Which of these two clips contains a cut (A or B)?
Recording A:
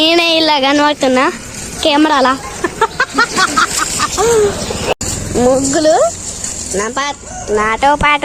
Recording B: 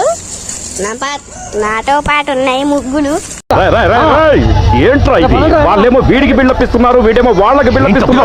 A